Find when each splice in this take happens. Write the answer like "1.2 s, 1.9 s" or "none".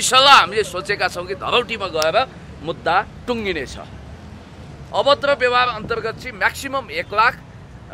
4.7 s